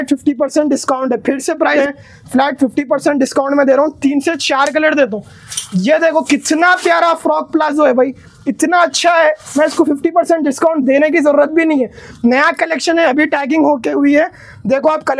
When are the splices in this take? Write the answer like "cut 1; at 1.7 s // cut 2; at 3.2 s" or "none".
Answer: cut 1; at 1.8 s